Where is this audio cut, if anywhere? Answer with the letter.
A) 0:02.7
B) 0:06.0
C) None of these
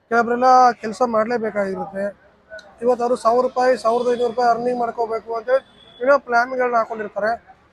C